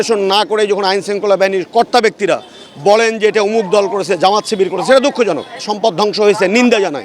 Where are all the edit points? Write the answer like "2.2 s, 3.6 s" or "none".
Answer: 5.7 s